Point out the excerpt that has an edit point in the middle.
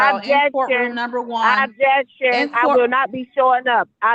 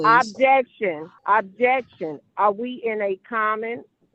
second; 1 cut; at 1.1 s

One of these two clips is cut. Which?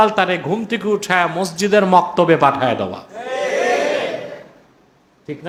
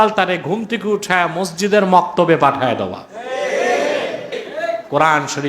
second; 1 cut; at 4.4 s

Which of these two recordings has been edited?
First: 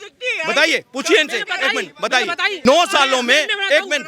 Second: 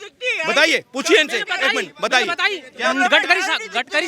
first; 1 cut; at 2.5 s

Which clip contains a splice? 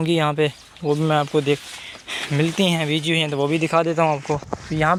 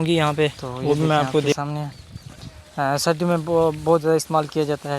second; 1 cut; at 1.6 s

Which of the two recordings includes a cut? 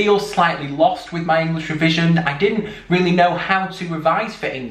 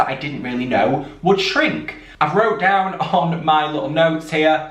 second; 1 cut; at 2.0 s

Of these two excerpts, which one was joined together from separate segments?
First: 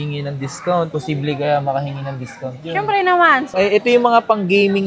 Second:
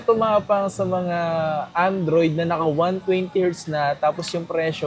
first; 1 cut; at 3.5 s

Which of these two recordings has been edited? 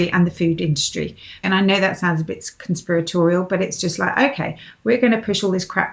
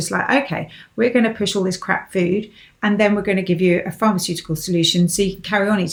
first; 1 cut; at 1.4 s

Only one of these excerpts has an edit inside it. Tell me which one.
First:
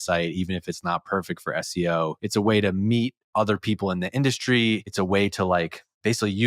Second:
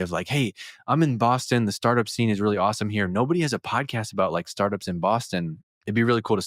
first; 2 cuts; at 2.2 s, 4.9 s

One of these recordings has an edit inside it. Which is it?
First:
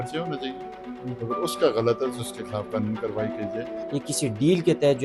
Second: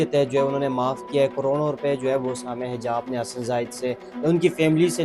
first; 1 cut; at 3.7 s

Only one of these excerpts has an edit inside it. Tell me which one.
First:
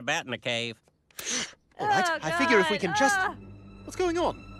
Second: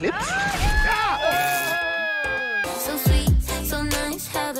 second; 1 cut; at 2.3 s

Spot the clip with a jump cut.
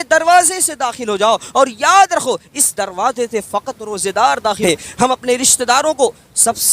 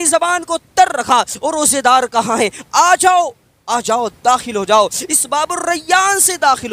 first; 1 cut; at 4.6 s

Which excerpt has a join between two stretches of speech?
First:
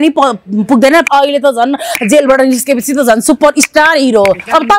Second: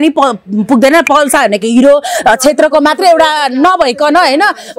first; 1 cut; at 1.1 s

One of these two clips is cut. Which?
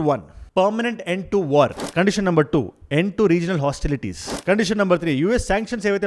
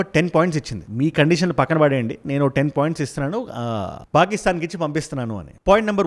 first; 2 cuts; at 1.8 s, 4.3 s

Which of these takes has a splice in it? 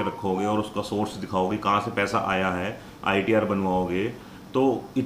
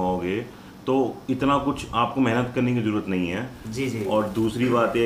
second; 1 cut; at 3.5 s

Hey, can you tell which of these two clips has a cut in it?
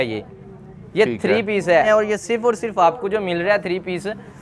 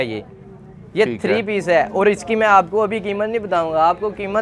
first; 1 cut; at 1.9 s

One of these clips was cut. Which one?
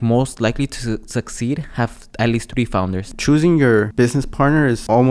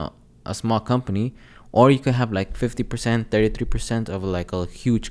first; 2 cuts; at 3.0 s, 4.2 s

